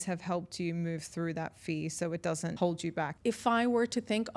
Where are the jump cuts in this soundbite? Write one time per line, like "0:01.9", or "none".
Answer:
0:03.0

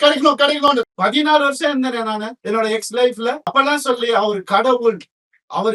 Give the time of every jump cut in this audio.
0:00.8
0:02.3
0:03.4

